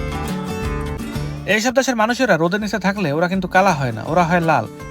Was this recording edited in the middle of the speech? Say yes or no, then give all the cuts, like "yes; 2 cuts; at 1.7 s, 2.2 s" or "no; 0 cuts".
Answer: yes; 1 cut; at 1.0 s